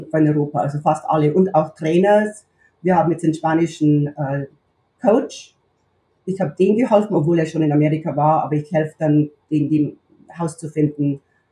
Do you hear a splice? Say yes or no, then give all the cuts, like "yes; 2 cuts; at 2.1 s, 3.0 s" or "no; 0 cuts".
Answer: no; 0 cuts